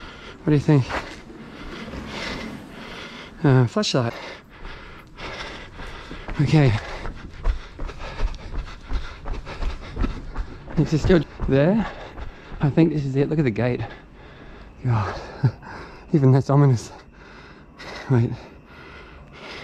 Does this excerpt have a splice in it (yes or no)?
yes